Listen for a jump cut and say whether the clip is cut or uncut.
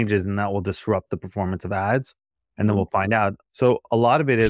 cut